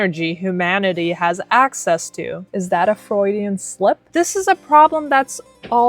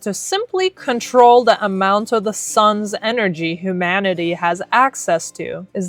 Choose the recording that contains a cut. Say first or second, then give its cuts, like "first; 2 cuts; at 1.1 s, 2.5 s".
first; 1 cut; at 4.1 s